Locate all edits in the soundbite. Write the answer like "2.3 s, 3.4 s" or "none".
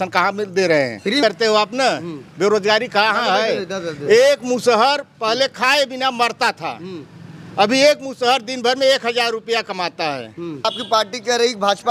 1.2 s, 10.7 s